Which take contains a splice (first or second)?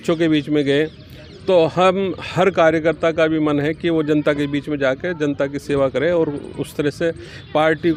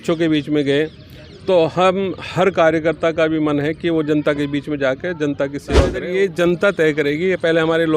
second